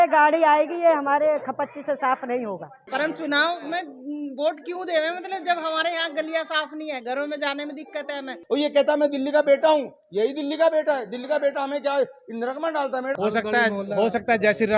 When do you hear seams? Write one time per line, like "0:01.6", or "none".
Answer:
0:02.7
0:08.4
0:13.1